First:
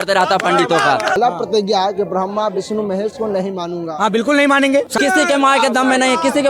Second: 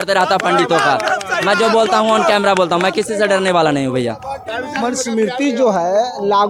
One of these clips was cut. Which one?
first; 2 cuts; at 1.2 s, 4.9 s

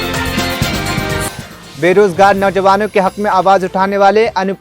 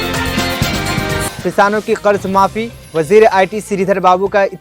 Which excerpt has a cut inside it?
first; 1 cut; at 1.3 s

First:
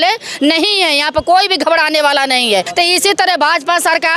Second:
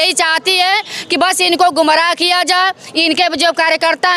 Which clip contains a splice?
first; 1 cut; at 2.7 s

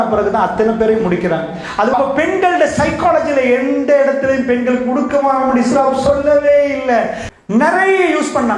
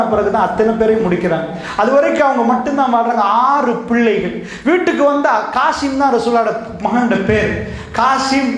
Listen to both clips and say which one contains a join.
first; 2 cuts; at 1.9 s, 7.2 s

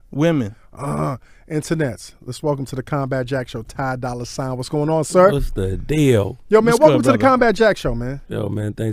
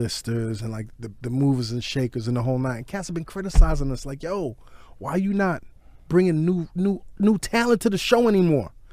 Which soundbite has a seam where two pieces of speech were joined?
second; 1 cut; at 4.4 s

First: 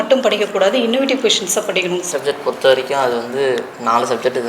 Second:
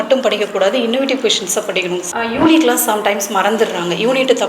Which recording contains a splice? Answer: first; 1 cut; at 2.1 s

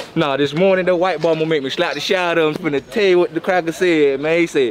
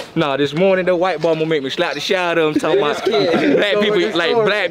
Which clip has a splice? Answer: first; 1 cut; at 2.5 s

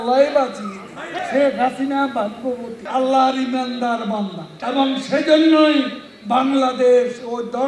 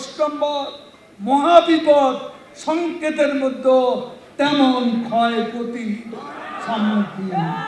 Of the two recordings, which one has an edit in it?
first; 3 cuts; at 1.1 s, 2.8 s, 4.5 s

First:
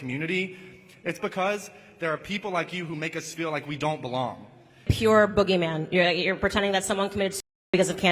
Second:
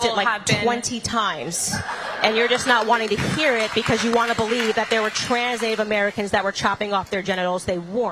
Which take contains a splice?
first; 1 cut; at 4.9 s

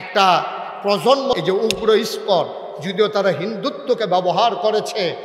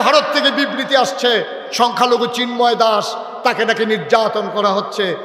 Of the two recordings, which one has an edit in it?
first; 1 cut; at 1.3 s

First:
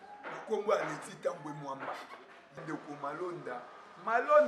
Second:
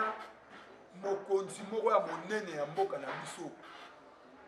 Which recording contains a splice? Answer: first; 1 cut; at 2.6 s

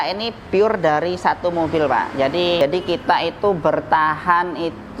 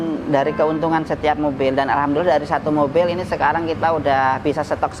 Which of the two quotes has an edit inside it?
first; 1 cut; at 2.6 s

